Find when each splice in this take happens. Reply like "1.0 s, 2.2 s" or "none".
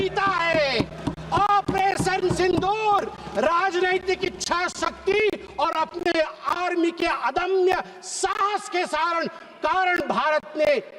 none